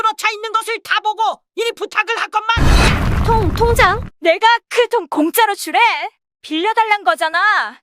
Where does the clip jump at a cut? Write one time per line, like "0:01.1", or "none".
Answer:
0:02.6
0:04.1